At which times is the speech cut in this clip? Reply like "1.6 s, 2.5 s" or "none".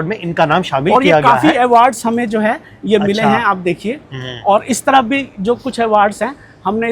none